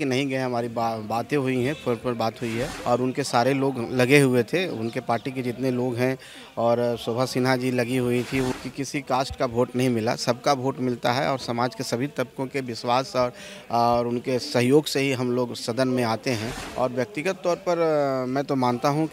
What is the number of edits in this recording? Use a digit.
3